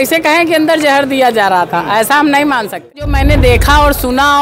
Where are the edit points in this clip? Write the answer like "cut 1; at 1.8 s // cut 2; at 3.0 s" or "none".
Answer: cut 1; at 3.1 s

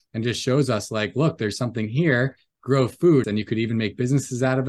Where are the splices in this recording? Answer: cut 1; at 3.3 s

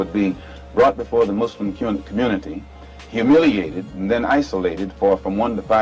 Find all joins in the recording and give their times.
none

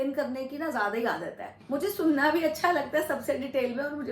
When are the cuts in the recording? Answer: cut 1; at 1.5 s

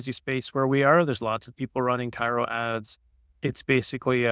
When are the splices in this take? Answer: cut 1; at 3.2 s

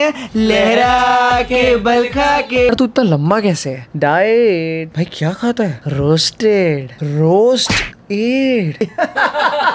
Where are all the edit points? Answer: cut 1; at 2.7 s // cut 2; at 8.8 s

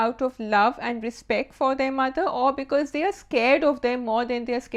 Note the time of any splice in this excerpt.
none

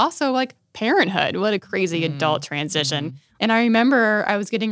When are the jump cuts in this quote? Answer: cut 1; at 3.2 s

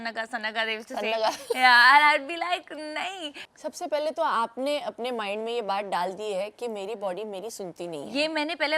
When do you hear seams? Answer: cut 1; at 3.4 s

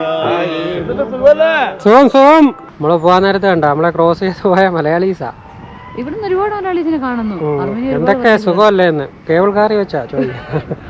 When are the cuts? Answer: cut 1; at 2.7 s

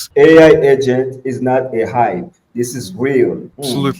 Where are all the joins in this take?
none

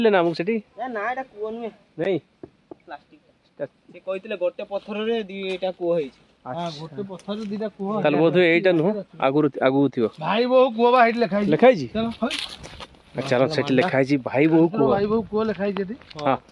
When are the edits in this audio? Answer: none

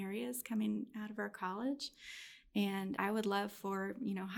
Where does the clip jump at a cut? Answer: cut 1; at 2.9 s

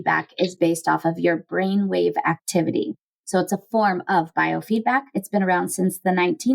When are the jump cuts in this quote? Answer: cut 1; at 5.2 s

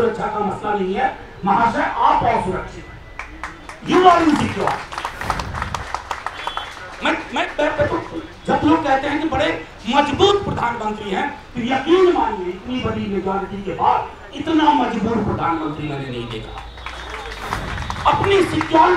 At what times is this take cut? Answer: none

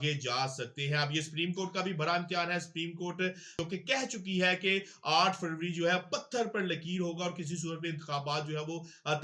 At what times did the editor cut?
cut 1; at 3.6 s

